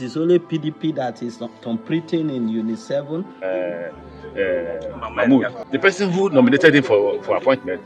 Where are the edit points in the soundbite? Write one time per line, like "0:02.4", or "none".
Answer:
0:03.4
0:05.6